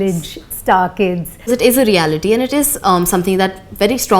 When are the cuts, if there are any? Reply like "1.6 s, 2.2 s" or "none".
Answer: 1.5 s